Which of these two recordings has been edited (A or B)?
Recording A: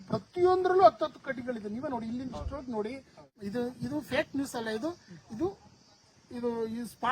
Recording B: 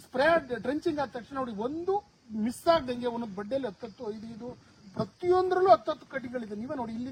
A